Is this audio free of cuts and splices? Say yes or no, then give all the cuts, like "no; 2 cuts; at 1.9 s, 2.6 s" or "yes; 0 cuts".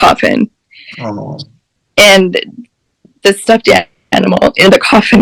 yes; 0 cuts